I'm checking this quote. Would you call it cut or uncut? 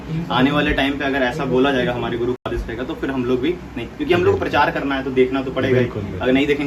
uncut